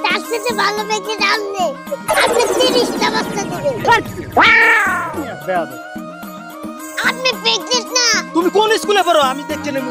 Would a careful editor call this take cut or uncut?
uncut